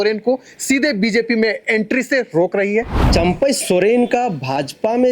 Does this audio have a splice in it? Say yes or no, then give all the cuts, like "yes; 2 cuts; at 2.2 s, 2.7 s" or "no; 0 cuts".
yes; 1 cut; at 3.0 s